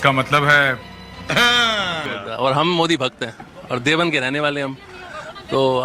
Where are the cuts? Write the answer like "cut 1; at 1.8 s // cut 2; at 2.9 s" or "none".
cut 1; at 2.1 s